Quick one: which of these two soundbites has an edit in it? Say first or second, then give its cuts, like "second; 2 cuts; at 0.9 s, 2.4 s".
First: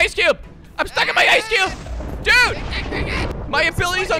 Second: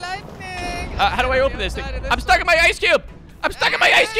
first; 1 cut; at 3.3 s